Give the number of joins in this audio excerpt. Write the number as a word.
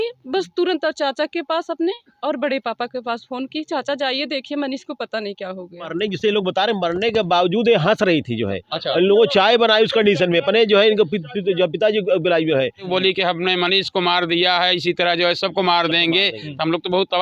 two